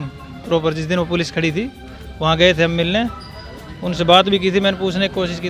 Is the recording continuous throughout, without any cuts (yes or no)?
yes